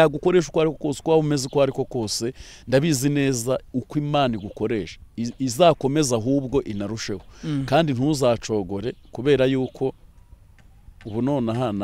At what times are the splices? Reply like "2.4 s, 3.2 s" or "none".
none